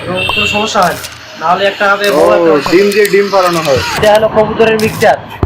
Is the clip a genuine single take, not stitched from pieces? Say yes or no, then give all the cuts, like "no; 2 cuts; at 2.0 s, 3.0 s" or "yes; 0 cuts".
no; 1 cut; at 4.0 s